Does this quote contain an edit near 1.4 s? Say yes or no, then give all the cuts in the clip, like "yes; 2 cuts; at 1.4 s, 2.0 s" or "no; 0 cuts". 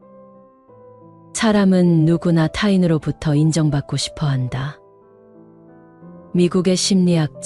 yes; 3 cuts; at 1.4 s, 4.8 s, 6.3 s